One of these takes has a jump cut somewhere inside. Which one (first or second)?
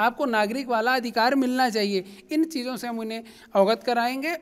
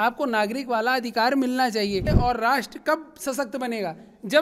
second